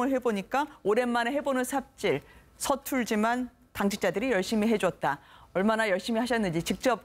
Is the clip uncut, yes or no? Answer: yes